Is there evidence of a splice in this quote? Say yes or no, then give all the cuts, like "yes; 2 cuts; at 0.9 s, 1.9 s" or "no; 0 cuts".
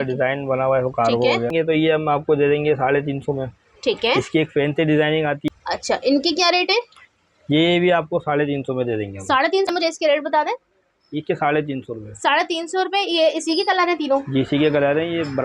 yes; 3 cuts; at 1.5 s, 5.4 s, 9.7 s